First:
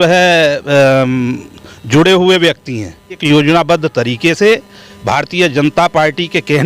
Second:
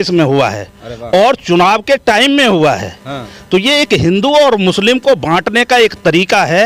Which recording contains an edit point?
first; 1 cut; at 3.2 s

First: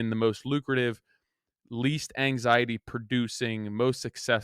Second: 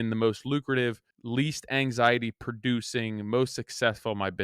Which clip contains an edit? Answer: second; 1 cut; at 1.1 s

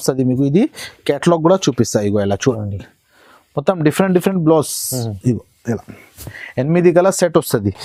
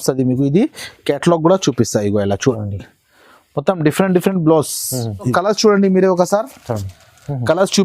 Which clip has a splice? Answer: second; 1 cut; at 5.3 s

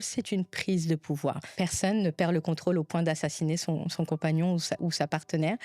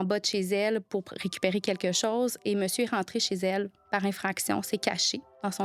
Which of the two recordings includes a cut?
first; 1 cut; at 1.5 s

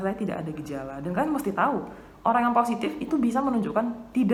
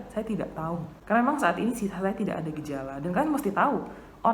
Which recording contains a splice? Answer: second; 1 cut; at 0.9 s

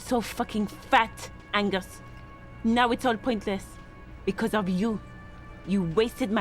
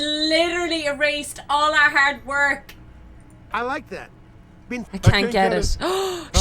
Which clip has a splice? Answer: second; 1 cut; at 4.9 s

